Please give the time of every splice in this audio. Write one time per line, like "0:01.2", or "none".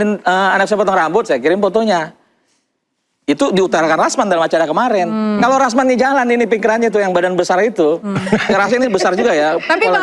none